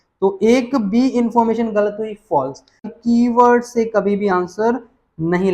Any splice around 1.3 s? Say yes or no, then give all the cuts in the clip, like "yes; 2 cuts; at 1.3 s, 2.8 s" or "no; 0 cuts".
no; 1 cut; at 2.9 s